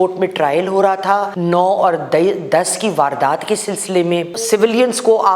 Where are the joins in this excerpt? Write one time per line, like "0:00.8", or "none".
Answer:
0:01.3
0:04.4

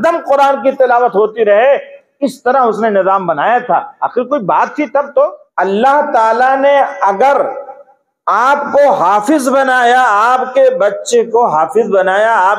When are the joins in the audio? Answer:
0:05.4

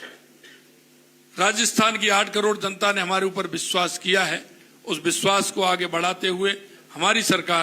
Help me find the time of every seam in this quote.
none

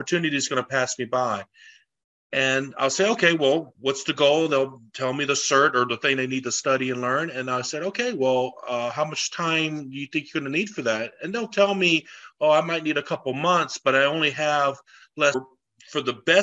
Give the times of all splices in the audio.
0:15.3

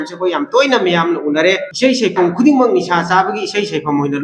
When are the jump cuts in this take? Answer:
0:01.7

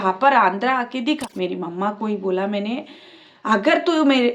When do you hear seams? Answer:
0:01.2

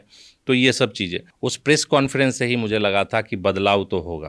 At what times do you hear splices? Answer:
0:01.2

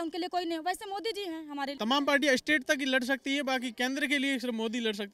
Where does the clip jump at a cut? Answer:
0:01.7

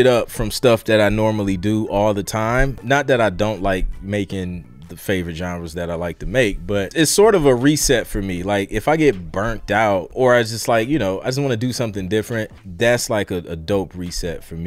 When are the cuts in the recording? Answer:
0:02.8
0:04.6
0:06.9
0:10.1
0:12.6

